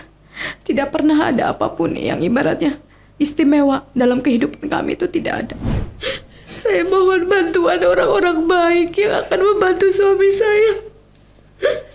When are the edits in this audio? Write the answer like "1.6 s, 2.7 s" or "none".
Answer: 5.6 s